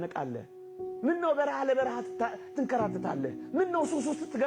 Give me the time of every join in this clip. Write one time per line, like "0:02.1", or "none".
none

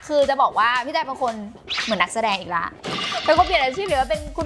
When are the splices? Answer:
none

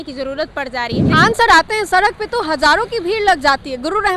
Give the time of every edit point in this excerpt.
0:01.0

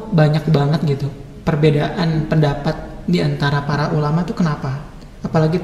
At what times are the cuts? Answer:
none

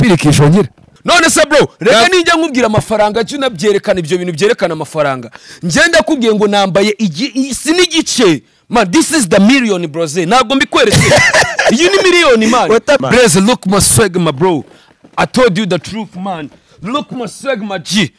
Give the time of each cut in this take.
0:00.9
0:13.0

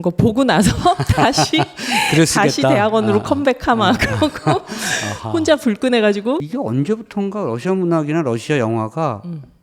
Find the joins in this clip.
0:06.5

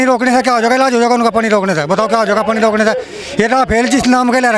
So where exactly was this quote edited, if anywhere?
none

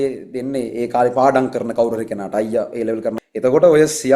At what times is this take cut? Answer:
0:03.1

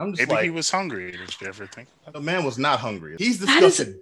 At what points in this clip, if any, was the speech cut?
0:03.1

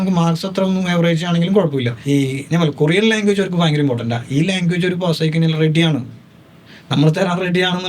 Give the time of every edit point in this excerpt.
0:02.0

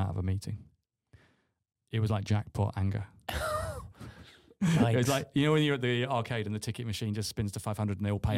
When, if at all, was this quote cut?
0:01.5

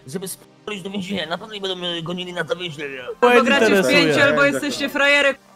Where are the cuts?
0:03.1

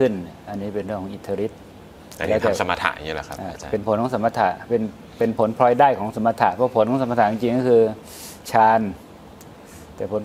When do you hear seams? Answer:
none

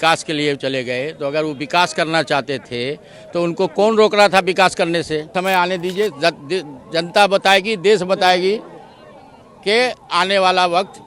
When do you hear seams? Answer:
0:05.3

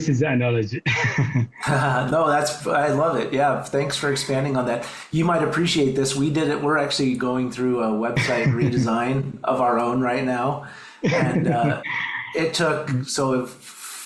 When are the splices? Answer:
none

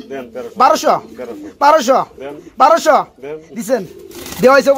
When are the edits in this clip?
none

